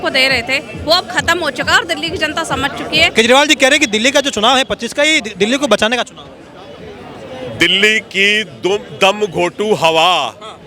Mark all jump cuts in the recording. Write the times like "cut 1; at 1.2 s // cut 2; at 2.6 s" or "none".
cut 1; at 3.1 s